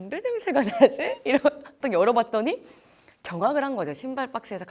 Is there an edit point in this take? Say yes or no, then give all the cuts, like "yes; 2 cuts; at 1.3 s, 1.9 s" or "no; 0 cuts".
yes; 1 cut; at 1.8 s